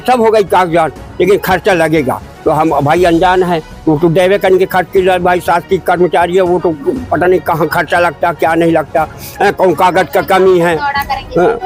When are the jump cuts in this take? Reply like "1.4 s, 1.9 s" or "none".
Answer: none

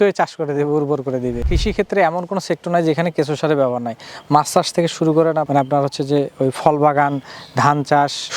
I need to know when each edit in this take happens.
1.5 s

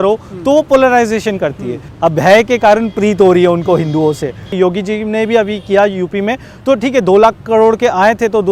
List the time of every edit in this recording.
1.8 s, 4.5 s

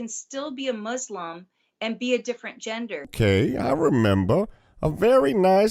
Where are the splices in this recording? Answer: 3.1 s

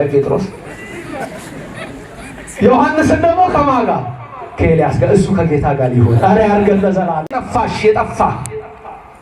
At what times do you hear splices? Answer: 7.3 s

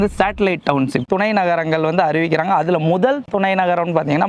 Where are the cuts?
1.1 s

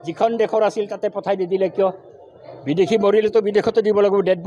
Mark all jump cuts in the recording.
none

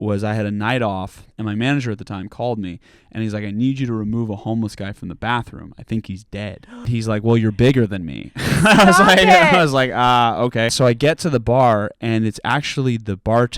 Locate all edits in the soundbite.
1.3 s, 6.9 s, 10.7 s

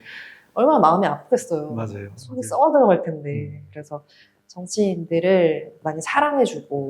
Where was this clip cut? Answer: 5.7 s

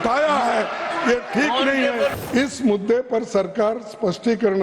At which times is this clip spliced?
2.2 s

